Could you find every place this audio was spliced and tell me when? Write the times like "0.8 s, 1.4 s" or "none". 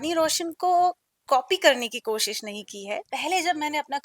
3.1 s